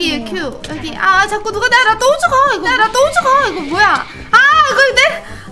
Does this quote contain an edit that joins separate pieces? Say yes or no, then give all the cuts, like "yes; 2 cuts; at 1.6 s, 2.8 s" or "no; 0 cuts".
no; 0 cuts